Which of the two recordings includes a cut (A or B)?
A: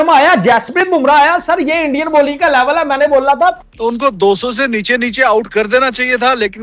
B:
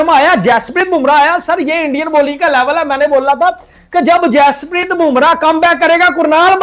A